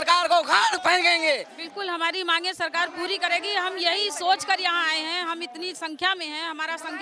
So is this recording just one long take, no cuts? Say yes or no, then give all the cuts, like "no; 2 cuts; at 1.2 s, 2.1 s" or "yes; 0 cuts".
yes; 0 cuts